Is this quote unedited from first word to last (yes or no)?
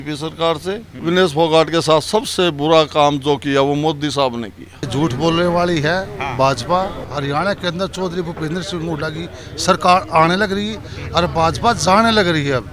no